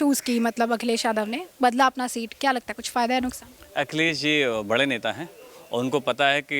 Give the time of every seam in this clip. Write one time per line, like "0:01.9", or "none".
none